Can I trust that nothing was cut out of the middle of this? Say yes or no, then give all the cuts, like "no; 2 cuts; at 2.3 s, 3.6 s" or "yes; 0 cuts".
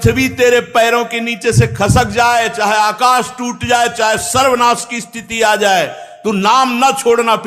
yes; 0 cuts